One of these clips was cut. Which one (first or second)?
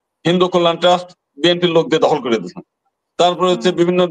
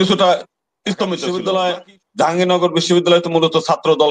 second